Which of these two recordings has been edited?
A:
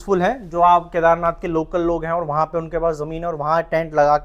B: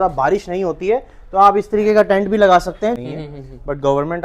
B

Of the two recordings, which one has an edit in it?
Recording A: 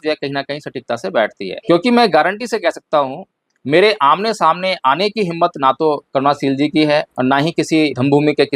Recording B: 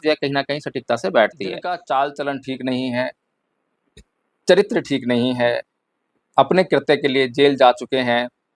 B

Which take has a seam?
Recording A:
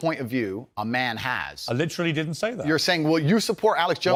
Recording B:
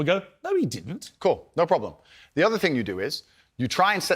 B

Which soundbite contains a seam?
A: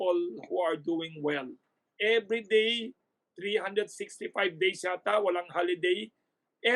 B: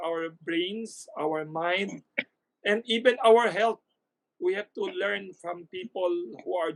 A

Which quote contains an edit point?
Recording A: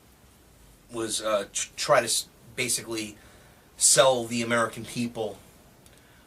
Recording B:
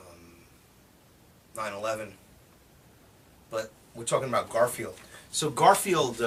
A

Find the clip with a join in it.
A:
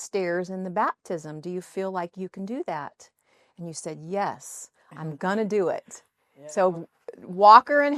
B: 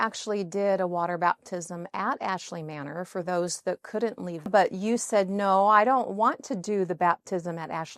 B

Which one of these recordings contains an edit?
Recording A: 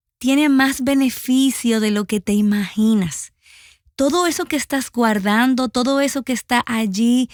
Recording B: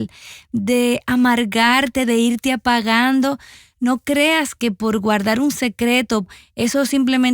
B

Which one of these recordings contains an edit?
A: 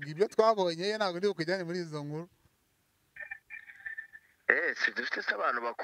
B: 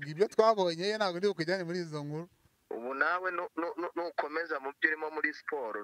B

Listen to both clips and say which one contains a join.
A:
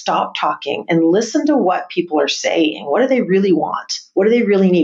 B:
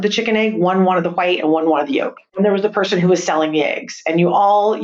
B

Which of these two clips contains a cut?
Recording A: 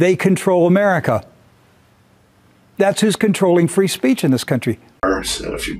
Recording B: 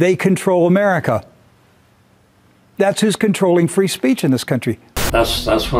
B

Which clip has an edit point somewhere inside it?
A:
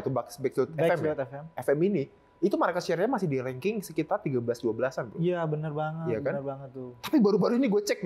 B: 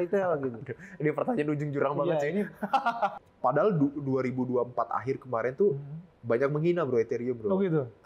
B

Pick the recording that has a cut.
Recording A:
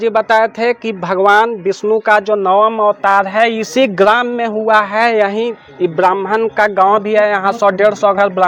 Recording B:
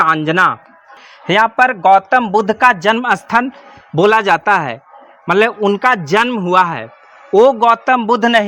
B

